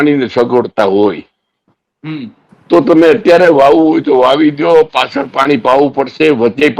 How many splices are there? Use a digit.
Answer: 0